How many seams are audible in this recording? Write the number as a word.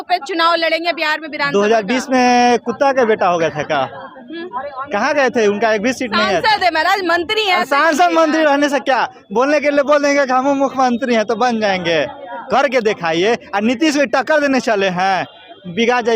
zero